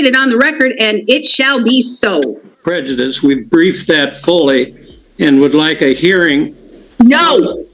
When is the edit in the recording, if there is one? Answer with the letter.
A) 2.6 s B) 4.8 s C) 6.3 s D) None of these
A